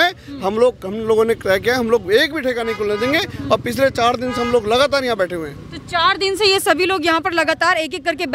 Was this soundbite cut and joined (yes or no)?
no